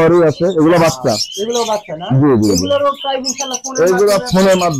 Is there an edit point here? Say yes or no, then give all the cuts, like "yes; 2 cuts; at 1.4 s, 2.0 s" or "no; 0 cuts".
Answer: no; 0 cuts